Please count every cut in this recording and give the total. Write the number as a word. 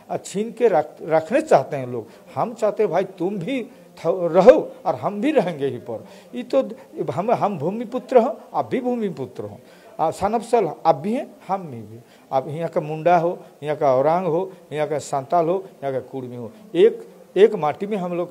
zero